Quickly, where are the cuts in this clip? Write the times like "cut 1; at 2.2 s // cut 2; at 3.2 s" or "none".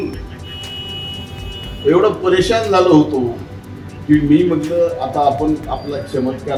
none